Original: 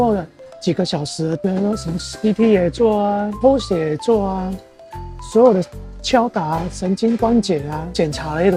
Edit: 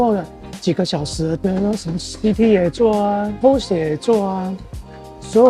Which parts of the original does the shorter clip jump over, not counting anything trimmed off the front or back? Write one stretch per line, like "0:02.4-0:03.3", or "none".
none